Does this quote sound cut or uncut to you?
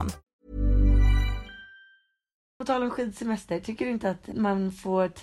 cut